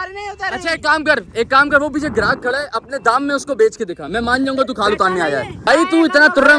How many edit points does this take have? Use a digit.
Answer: 1